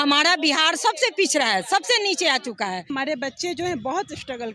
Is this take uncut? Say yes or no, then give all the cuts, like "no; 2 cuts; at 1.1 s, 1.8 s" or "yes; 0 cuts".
no; 1 cut; at 2.9 s